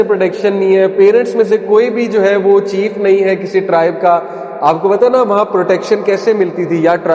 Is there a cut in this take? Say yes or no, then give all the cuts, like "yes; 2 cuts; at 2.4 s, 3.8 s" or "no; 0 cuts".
no; 0 cuts